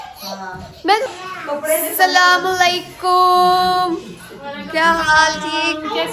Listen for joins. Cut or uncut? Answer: cut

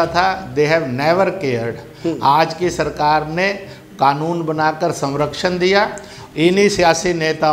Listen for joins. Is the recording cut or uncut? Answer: cut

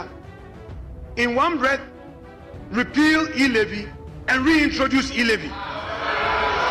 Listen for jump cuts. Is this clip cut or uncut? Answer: uncut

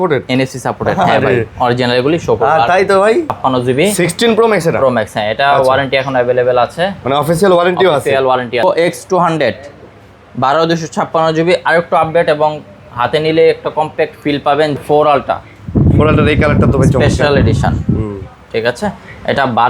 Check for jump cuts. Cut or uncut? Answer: cut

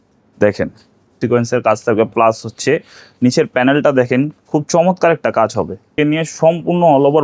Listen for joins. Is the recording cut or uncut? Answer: cut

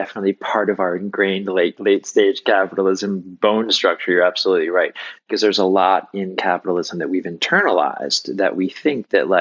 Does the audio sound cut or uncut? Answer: cut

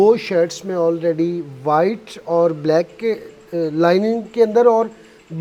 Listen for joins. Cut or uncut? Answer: uncut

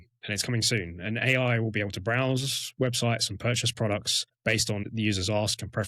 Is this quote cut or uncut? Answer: cut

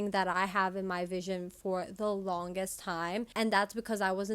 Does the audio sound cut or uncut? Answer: cut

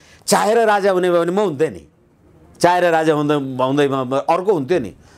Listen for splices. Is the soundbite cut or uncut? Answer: uncut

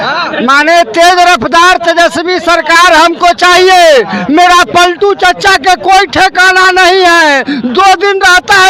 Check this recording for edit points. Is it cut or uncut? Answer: uncut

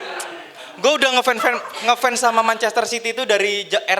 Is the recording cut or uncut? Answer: uncut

